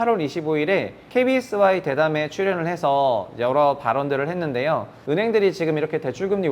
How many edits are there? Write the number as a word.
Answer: two